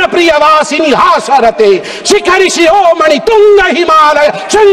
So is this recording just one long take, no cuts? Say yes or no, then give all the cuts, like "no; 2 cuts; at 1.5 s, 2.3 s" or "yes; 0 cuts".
yes; 0 cuts